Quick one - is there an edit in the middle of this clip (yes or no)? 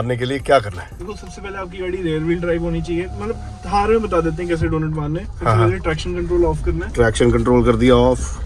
no